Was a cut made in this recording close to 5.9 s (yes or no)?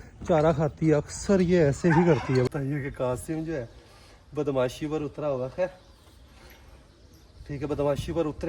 no